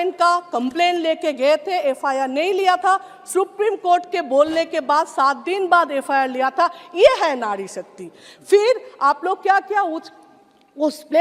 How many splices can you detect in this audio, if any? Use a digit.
0